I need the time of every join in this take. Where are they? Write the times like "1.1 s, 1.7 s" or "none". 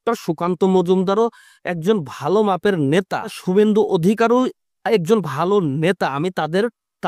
3.4 s